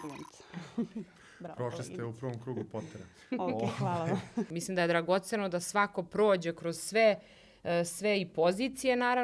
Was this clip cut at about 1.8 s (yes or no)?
no